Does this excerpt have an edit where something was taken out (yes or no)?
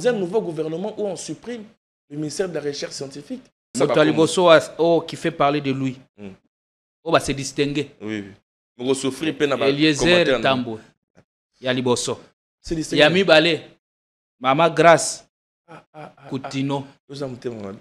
yes